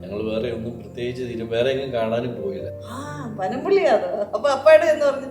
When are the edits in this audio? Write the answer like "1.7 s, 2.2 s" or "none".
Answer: 2.7 s